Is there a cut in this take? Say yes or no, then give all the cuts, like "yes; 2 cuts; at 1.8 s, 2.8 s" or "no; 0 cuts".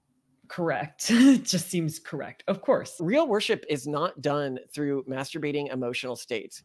yes; 1 cut; at 2.9 s